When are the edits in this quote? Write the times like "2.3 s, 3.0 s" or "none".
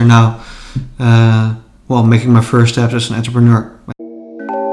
3.8 s